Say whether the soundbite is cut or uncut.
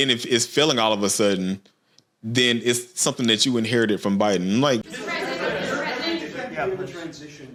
uncut